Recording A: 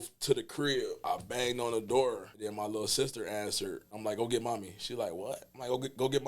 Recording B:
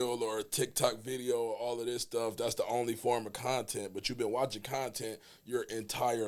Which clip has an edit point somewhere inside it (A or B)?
A